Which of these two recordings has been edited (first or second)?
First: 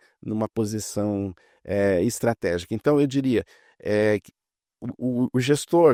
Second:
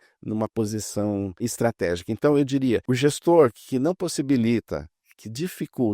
second